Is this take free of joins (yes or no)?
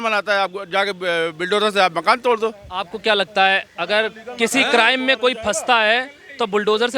yes